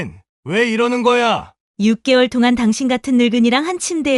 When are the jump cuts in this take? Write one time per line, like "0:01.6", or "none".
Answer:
0:01.6